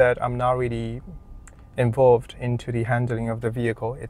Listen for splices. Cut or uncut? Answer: uncut